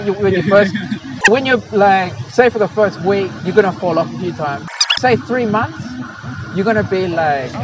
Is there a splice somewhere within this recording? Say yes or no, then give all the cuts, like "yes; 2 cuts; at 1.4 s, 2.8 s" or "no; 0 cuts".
yes; 1 cut; at 4.9 s